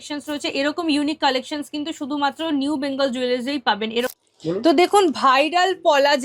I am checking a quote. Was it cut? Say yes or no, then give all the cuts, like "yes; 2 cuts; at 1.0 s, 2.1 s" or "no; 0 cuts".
yes; 1 cut; at 4.1 s